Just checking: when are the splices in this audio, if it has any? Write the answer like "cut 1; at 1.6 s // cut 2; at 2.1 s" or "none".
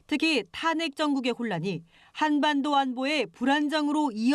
cut 1; at 2.0 s